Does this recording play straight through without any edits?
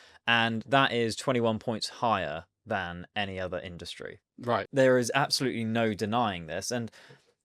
no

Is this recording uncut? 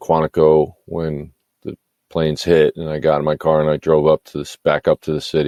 yes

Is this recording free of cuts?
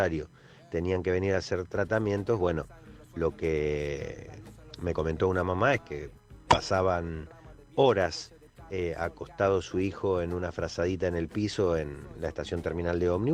yes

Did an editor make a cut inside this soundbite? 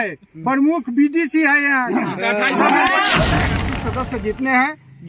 yes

